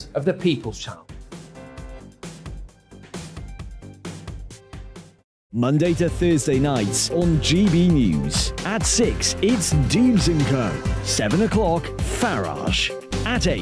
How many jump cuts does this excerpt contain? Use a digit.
1